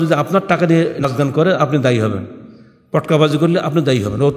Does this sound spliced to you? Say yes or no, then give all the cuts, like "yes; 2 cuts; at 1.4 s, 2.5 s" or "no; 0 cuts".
yes; 1 cut; at 1.0 s